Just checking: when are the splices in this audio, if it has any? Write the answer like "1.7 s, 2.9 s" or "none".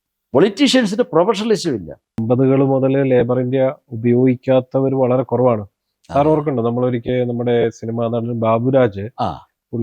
2.2 s

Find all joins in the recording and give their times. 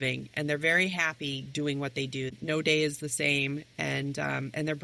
2.3 s

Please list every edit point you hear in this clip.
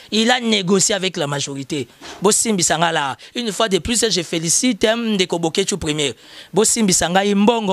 none

